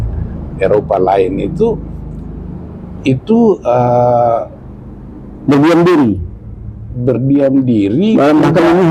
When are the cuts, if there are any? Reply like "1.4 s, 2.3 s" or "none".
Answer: none